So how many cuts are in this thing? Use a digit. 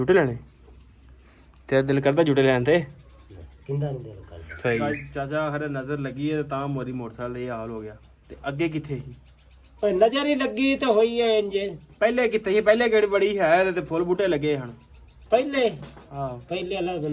1